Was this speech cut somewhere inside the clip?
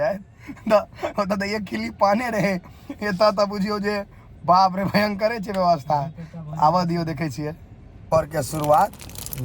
no; 0 cuts

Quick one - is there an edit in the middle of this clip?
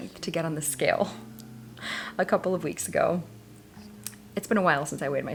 no; 0 cuts

